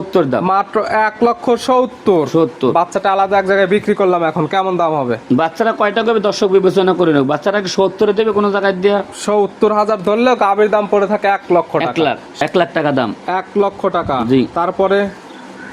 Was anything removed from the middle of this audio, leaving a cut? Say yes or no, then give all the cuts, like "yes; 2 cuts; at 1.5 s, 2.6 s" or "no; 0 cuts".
yes; 1 cut; at 12.4 s